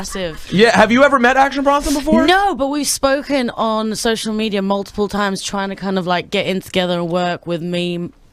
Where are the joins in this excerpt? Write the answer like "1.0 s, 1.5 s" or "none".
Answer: 1.9 s